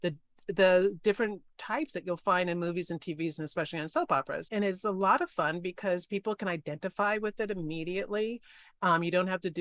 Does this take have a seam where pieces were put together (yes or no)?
yes